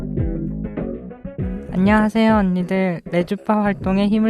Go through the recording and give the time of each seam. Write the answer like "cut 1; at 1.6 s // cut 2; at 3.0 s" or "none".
cut 1; at 1.7 s